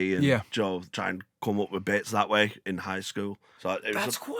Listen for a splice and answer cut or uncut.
cut